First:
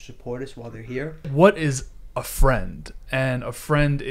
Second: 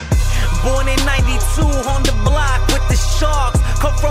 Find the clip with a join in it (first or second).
first